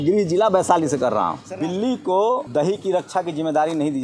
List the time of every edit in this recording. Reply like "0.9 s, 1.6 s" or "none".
1.4 s, 2.5 s

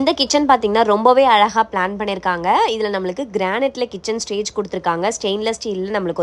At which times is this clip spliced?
none

